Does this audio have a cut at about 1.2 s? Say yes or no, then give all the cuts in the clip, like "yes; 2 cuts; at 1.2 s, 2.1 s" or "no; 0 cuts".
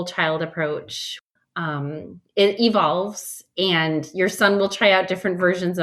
yes; 1 cut; at 1.2 s